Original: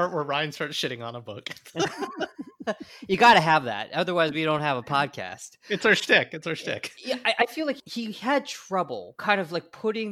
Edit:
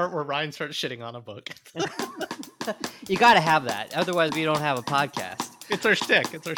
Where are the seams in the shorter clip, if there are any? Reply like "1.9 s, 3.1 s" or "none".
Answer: none